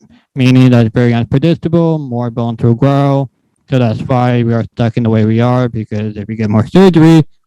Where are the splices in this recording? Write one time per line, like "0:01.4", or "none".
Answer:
none